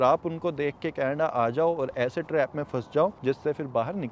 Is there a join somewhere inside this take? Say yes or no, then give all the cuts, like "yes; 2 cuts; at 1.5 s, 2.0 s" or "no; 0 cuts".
no; 0 cuts